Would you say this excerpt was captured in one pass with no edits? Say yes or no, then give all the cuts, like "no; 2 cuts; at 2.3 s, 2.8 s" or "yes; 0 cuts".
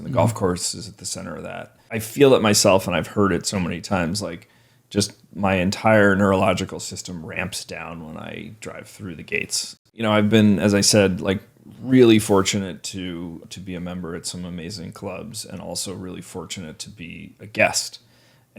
no; 3 cuts; at 2.0 s, 9.8 s, 13.4 s